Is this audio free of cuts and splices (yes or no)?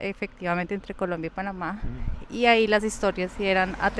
yes